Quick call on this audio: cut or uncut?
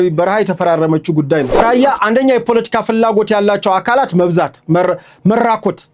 cut